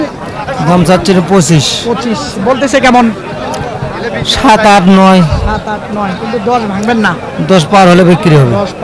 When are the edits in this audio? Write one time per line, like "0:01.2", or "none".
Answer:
none

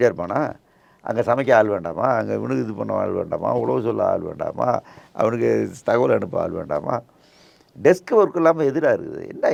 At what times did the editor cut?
none

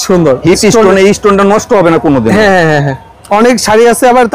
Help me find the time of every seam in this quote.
none

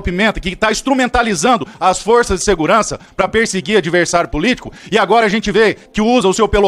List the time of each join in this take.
none

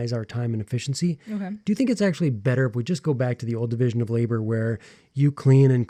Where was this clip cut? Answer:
none

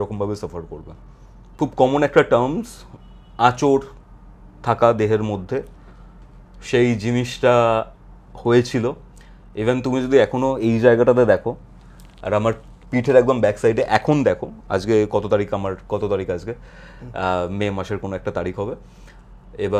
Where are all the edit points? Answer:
0:01.5

